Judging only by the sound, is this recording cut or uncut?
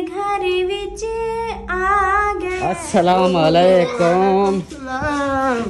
cut